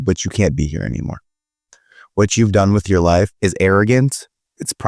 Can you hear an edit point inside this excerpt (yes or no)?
yes